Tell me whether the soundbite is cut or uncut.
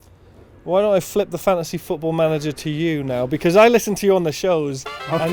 uncut